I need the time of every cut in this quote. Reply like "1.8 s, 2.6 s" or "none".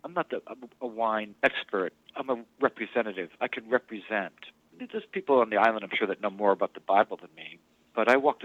1.3 s, 4.8 s